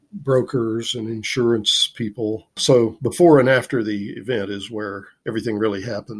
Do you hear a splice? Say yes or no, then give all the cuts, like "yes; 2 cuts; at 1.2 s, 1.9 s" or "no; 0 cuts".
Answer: yes; 1 cut; at 5.1 s